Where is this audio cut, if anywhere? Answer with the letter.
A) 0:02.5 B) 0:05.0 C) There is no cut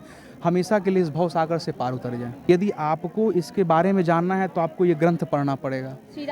A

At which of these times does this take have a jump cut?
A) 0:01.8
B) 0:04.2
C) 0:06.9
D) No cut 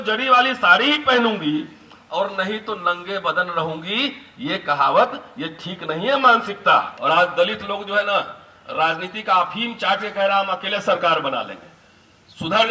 C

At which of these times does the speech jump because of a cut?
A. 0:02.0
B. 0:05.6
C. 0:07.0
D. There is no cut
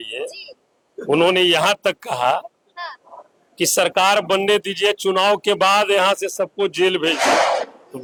D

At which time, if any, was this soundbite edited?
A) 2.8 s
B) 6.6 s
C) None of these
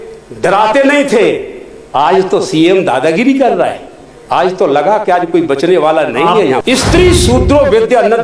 B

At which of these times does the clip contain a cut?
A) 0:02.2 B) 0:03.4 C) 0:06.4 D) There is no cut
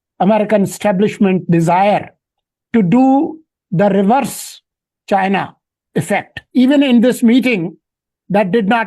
C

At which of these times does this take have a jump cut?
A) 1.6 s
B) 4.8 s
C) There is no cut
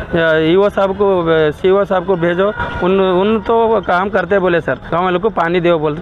B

